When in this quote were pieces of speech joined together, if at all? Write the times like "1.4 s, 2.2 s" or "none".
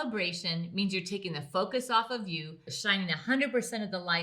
2.7 s